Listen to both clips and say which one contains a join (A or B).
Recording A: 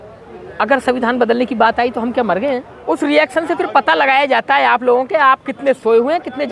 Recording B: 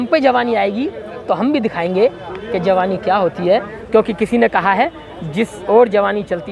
A